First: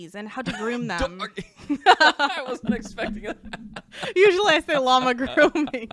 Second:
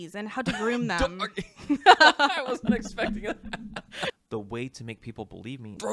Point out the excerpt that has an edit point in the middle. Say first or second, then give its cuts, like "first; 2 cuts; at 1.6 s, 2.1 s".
second; 1 cut; at 4.1 s